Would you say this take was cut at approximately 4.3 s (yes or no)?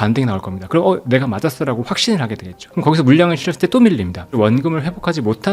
yes